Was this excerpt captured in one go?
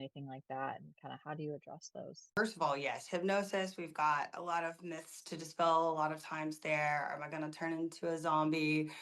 no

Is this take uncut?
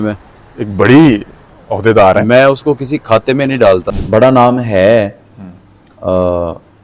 no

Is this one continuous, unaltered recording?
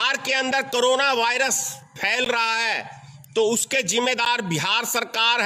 yes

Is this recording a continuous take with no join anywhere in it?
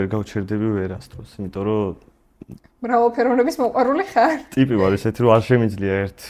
yes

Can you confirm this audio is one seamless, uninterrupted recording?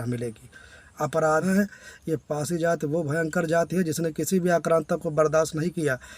no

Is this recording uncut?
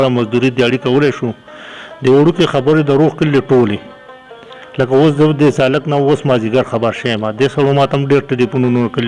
yes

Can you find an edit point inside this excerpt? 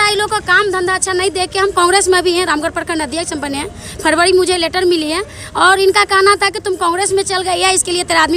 no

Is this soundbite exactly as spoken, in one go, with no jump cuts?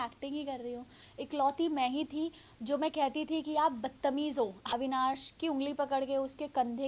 no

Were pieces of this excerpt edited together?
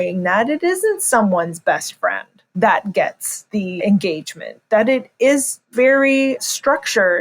yes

